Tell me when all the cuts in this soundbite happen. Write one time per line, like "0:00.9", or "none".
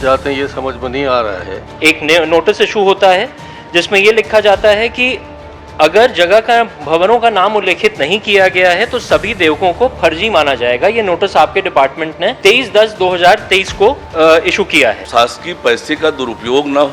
0:01.6
0:12.4
0:14.0
0:15.0

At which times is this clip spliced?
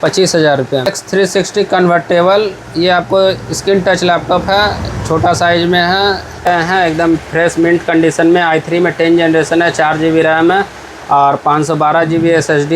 0:00.9
0:06.5

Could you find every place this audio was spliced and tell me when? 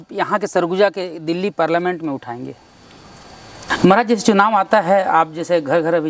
0:03.7

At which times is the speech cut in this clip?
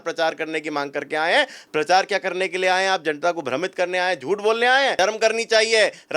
0:05.0

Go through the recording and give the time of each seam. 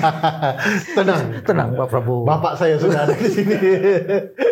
none

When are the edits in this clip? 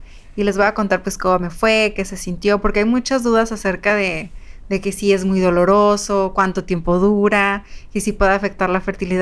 none

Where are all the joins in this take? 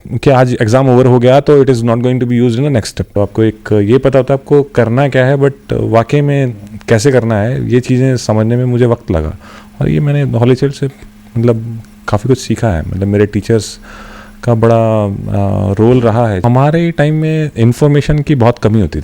0:03.1
0:16.4

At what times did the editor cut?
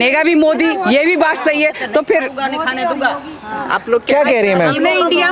none

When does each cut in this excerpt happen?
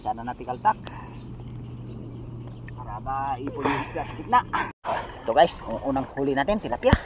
0:04.8

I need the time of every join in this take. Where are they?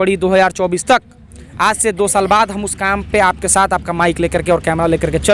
none

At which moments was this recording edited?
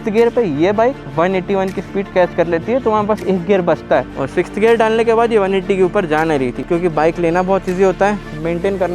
0:04.1
0:06.6

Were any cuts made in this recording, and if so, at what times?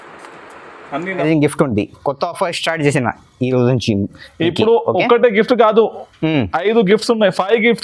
0:01.2

